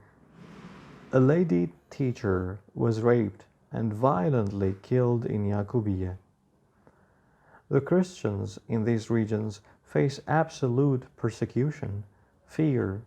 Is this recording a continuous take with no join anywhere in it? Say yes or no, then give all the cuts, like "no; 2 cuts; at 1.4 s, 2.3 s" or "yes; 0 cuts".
yes; 0 cuts